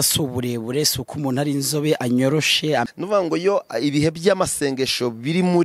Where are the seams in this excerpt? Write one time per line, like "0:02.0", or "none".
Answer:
0:02.8